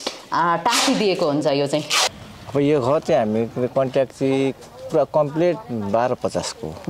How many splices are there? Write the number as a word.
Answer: one